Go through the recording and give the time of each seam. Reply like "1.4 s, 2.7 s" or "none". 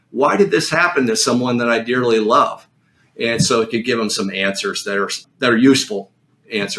5.2 s